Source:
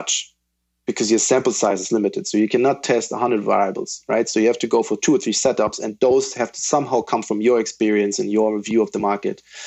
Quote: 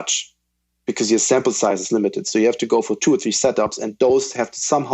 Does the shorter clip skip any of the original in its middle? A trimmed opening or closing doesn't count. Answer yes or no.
yes